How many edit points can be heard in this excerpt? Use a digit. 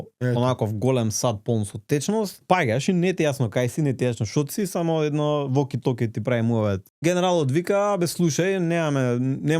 2